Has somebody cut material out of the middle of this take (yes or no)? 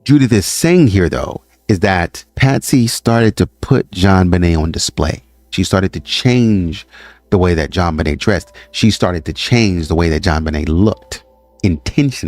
yes